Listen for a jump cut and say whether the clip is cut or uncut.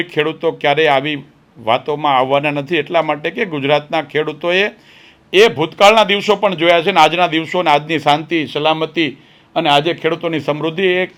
uncut